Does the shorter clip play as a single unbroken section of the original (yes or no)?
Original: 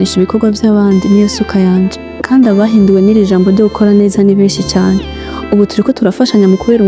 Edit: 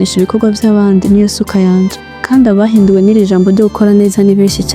yes